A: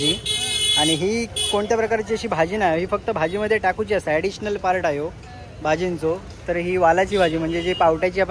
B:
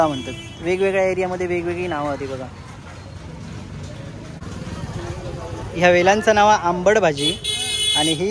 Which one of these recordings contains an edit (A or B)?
B